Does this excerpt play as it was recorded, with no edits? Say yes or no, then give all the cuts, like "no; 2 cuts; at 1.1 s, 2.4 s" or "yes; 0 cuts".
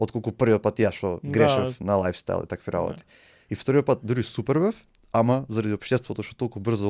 yes; 0 cuts